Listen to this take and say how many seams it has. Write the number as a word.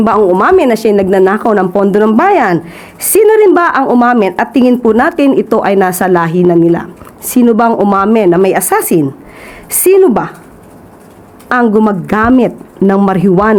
zero